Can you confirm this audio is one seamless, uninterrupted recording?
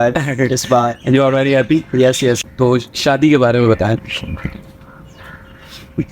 no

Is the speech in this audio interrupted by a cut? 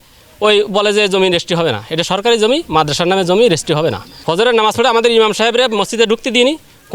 yes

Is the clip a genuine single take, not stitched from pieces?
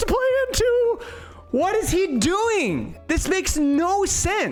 yes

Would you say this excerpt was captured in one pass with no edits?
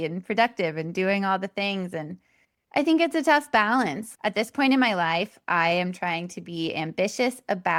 yes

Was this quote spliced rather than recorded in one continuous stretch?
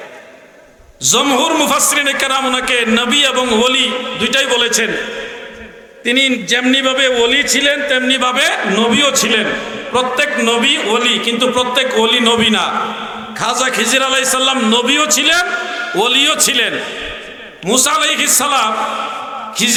no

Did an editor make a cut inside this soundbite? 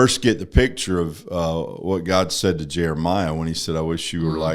no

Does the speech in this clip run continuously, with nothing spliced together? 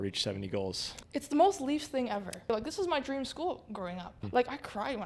no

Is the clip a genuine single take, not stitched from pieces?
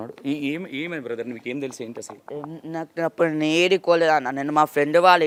yes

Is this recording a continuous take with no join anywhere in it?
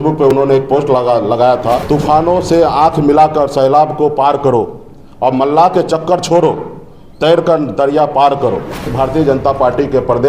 no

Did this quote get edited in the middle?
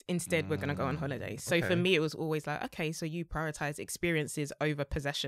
no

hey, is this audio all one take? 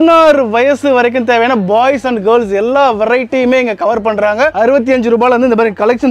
yes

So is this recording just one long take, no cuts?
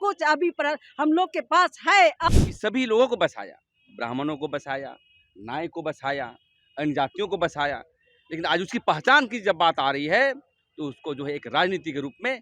no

